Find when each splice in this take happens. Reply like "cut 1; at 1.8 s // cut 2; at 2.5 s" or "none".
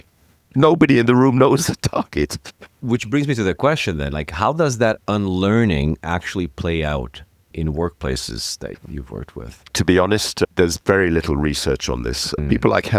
none